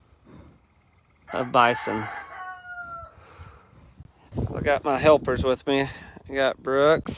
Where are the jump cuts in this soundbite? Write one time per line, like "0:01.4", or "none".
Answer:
0:04.3